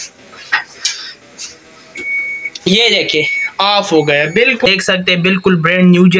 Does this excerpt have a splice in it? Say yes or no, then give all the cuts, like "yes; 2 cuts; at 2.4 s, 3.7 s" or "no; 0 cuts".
yes; 1 cut; at 4.7 s